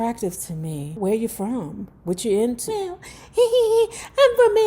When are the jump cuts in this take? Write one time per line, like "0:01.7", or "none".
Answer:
0:00.9
0:02.9